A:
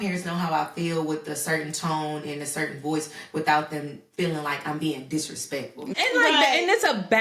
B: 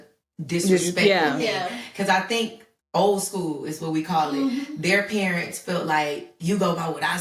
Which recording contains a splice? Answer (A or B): A